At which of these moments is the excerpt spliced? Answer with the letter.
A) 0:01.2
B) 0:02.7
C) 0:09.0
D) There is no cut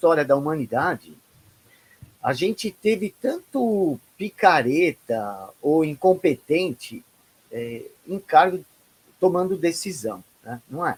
D